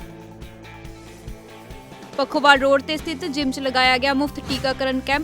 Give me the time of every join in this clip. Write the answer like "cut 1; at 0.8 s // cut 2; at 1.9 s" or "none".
cut 1; at 1.9 s